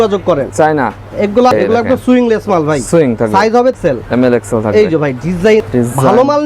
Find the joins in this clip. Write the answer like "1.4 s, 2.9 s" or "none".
1.5 s, 3.8 s, 5.7 s